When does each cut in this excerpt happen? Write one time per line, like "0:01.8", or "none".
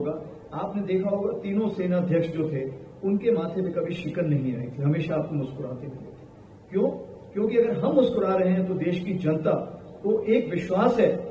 none